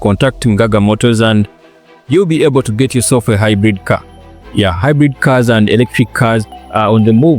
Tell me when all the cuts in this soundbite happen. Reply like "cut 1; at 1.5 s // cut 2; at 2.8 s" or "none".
none

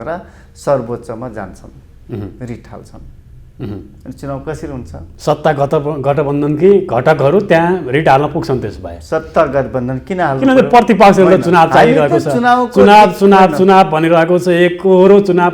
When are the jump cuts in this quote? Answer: none

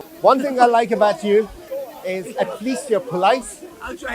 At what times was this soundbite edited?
cut 1; at 1.6 s

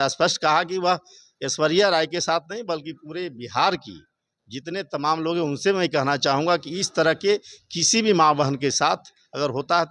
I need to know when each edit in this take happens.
none

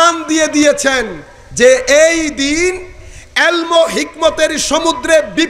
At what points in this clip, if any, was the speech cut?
none

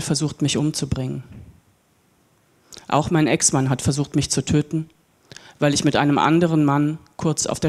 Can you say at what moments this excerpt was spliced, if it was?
none

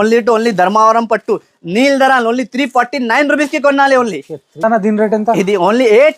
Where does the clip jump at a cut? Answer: cut 1; at 4.6 s

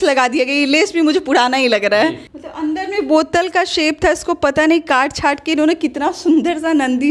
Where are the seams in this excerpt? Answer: cut 1; at 2.3 s

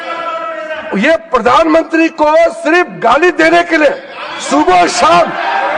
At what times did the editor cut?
none

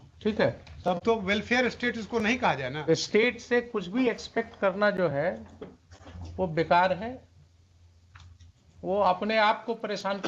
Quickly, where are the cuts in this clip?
none

